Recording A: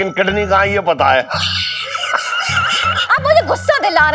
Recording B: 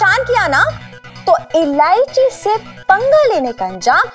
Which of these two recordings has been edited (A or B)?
A